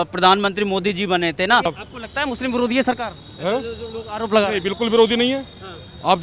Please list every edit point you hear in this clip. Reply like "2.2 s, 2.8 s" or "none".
1.8 s